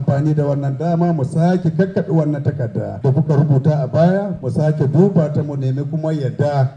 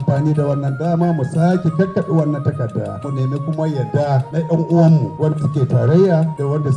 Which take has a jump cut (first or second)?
second